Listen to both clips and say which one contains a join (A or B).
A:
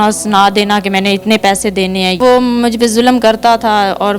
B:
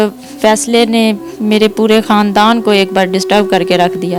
A